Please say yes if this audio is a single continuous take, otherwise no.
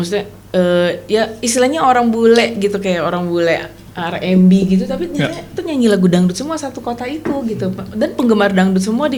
yes